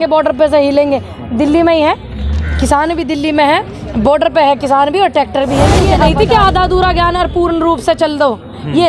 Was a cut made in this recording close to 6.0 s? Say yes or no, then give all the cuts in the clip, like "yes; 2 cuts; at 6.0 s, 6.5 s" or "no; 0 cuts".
yes; 1 cut; at 6.0 s